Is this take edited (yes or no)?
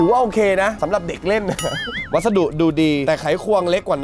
yes